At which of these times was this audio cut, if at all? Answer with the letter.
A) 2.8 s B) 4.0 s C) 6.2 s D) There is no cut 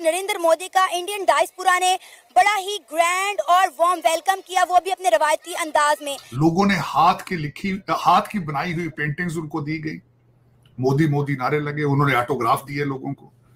C